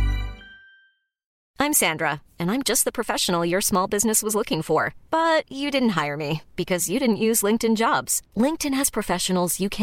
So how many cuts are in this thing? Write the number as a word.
one